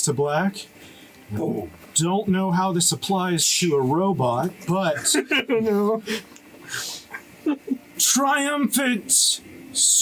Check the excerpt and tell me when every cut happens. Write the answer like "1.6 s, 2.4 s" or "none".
none